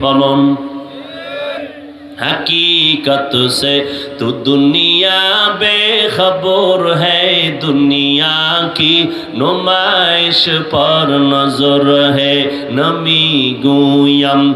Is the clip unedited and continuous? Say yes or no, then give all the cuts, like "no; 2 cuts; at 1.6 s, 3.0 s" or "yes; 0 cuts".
no; 1 cut; at 1.6 s